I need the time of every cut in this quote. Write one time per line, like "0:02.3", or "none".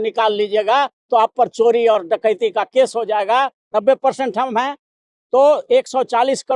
0:03.6